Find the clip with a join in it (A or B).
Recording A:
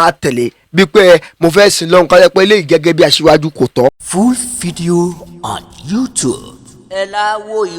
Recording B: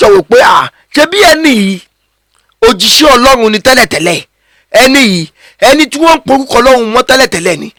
A